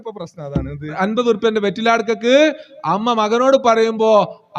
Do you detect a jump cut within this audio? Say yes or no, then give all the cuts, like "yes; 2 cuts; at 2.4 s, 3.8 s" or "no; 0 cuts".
yes; 1 cut; at 0.9 s